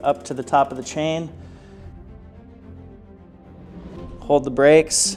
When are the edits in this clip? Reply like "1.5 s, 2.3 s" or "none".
none